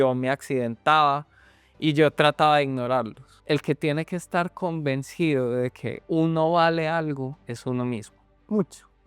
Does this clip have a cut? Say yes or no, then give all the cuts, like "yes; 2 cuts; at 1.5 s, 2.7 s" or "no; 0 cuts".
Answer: yes; 3 cuts; at 3.3 s, 5.9 s, 7.4 s